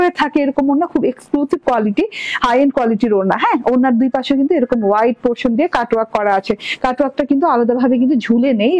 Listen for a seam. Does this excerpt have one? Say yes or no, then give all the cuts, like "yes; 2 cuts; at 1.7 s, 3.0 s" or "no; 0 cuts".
no; 0 cuts